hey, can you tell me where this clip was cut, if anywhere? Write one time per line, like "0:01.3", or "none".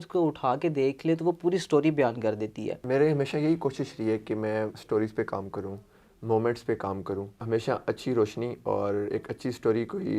0:02.7
0:07.4